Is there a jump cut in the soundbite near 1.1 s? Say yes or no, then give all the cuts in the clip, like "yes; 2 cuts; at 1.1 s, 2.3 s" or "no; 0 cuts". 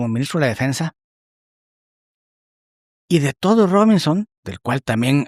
no; 0 cuts